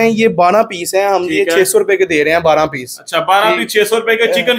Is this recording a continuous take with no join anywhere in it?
yes; 0 cuts

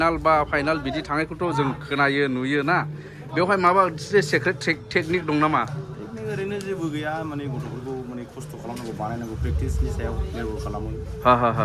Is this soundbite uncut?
yes; 0 cuts

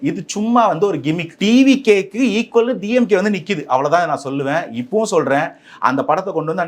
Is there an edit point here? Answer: yes; 1 cut; at 1.3 s

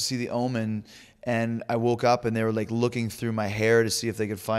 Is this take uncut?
yes; 0 cuts

